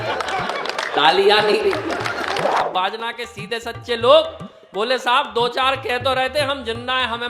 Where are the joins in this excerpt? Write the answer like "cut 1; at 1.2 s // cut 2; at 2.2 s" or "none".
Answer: cut 1; at 2.7 s